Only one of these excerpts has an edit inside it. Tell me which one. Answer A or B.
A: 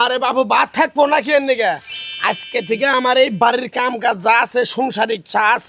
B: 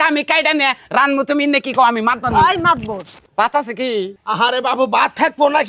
B